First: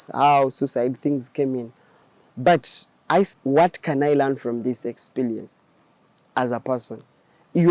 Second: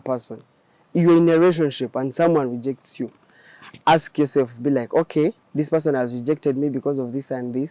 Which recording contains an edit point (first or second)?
first